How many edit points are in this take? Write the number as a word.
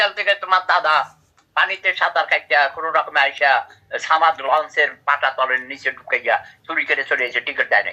zero